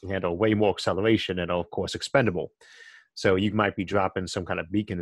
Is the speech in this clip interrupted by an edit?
no; 0 cuts

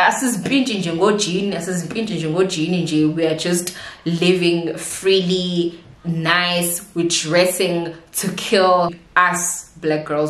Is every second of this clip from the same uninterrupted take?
no; 1 cut; at 9.0 s

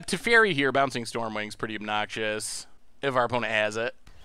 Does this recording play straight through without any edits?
yes; 0 cuts

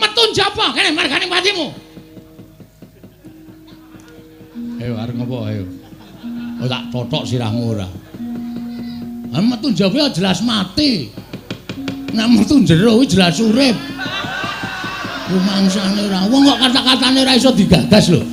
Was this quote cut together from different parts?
no; 0 cuts

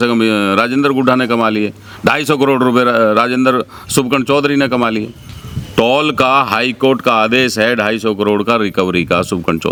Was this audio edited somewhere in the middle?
no; 0 cuts

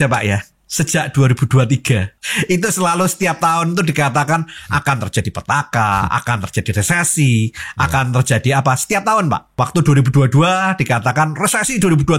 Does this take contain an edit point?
yes; 2 cuts; at 2.2 s, 9.5 s

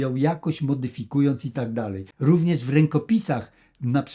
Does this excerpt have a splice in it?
yes; 1 cut; at 2.0 s

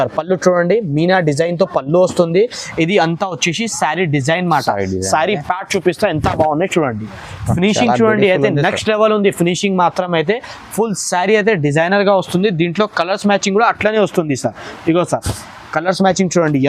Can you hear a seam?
no; 0 cuts

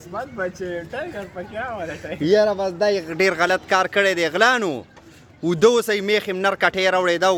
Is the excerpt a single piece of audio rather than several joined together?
yes; 0 cuts

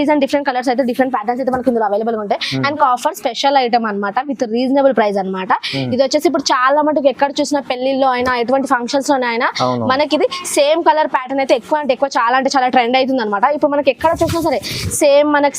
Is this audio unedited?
no; 1 cut; at 2.8 s

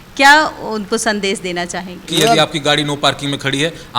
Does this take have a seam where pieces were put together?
yes; 1 cut; at 2.1 s

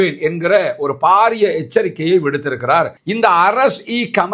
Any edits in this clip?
yes; 1 cut; at 3.0 s

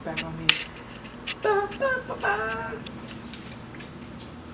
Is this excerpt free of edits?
yes; 0 cuts

